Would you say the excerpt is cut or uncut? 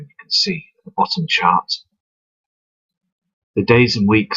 uncut